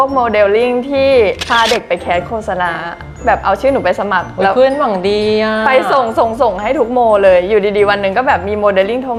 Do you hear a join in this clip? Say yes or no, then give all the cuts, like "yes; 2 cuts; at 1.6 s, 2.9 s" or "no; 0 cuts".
no; 0 cuts